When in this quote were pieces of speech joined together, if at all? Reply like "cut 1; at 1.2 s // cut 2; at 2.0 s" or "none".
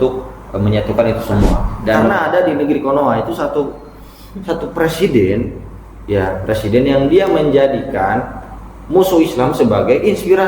cut 1; at 2.1 s